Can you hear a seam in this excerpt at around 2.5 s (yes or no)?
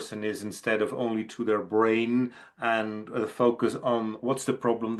no